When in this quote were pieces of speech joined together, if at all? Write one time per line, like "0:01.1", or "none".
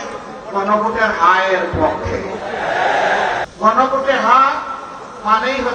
0:03.5